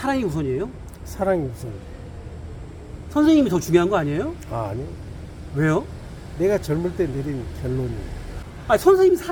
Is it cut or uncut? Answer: uncut